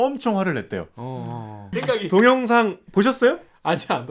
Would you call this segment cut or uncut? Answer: cut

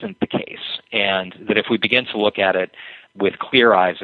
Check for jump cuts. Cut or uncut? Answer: cut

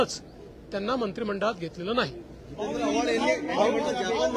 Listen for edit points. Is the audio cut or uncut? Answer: uncut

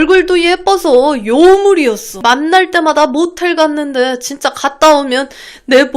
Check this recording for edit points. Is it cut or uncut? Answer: cut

